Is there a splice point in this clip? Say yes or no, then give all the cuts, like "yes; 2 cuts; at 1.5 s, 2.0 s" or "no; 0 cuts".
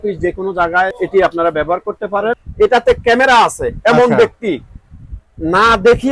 yes; 2 cuts; at 0.9 s, 2.5 s